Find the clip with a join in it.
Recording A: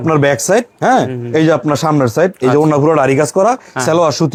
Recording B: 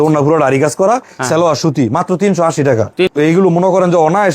B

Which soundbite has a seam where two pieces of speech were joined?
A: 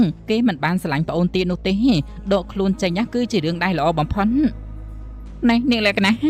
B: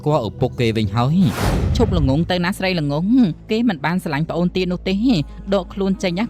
B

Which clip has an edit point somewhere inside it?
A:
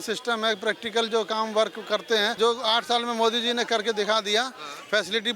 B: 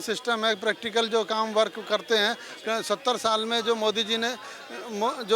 A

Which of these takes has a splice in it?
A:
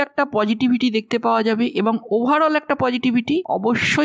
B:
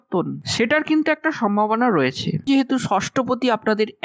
B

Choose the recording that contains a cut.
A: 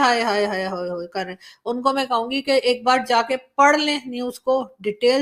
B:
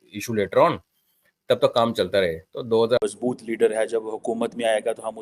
B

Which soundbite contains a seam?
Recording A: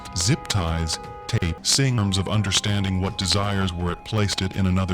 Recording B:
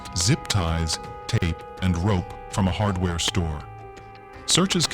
A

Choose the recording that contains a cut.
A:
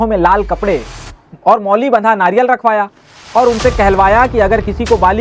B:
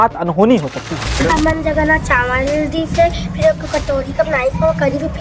B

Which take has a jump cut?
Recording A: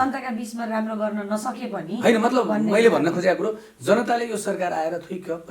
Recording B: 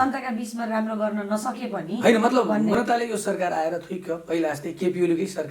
B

